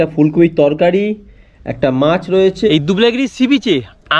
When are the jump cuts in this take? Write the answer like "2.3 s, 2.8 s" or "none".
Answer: 2.7 s

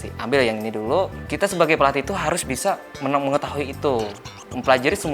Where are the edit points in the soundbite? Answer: 1.2 s, 2.9 s

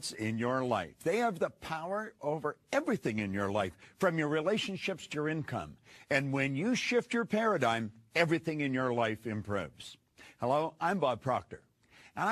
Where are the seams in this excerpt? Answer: 6.4 s

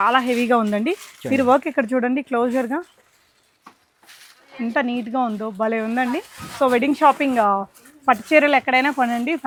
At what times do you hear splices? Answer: none

